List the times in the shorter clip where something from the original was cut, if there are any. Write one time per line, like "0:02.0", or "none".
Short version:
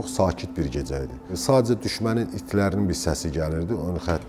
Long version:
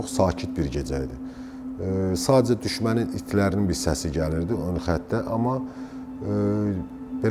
0:01.4